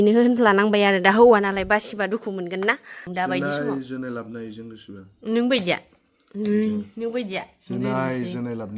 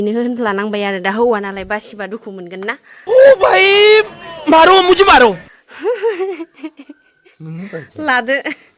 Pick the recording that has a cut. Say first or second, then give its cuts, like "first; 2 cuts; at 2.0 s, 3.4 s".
first; 1 cut; at 2.9 s